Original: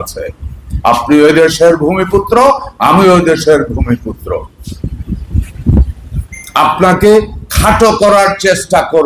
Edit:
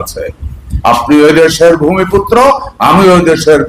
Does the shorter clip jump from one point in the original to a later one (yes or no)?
no